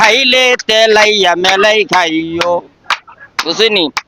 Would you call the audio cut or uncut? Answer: uncut